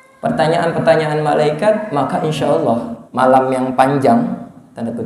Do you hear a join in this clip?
yes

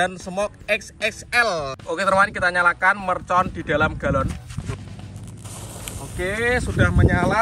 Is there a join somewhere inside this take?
yes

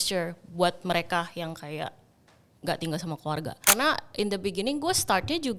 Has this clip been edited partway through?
yes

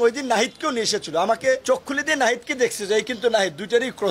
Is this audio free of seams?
yes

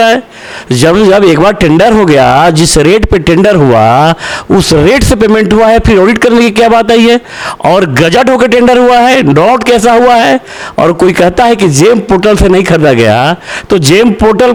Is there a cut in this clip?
no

